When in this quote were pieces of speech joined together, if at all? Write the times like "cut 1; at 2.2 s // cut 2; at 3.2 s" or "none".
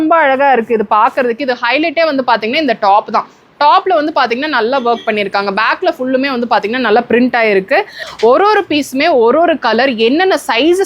cut 1; at 8.0 s